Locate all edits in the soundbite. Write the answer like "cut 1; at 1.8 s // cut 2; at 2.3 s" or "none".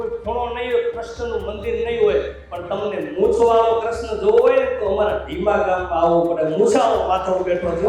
none